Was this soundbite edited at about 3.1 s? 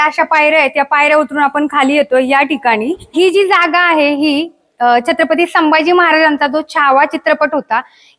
yes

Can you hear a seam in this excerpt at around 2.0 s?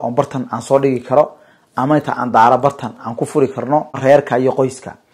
no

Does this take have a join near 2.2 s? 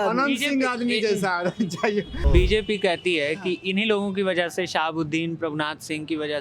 yes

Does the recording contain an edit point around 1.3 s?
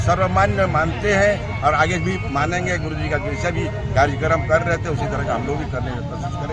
no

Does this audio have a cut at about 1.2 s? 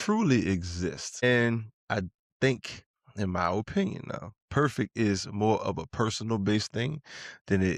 yes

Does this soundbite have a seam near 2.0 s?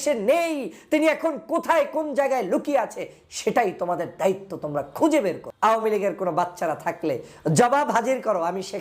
no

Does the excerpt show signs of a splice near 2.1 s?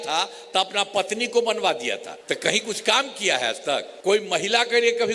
yes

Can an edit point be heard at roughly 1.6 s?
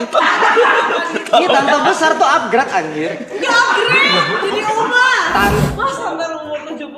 no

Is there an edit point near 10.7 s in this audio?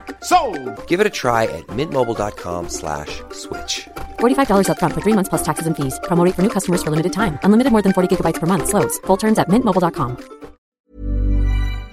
yes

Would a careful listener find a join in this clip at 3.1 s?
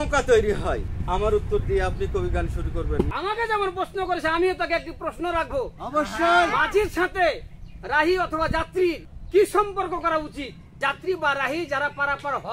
yes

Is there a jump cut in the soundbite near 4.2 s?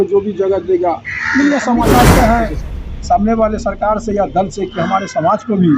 no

